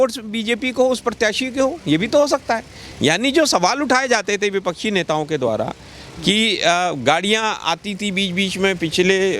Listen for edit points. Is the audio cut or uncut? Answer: uncut